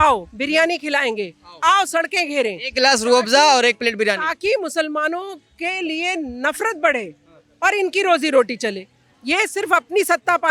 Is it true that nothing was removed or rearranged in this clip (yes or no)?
yes